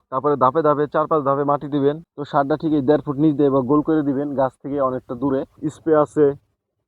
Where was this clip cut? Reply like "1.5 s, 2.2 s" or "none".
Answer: 2.1 s, 5.6 s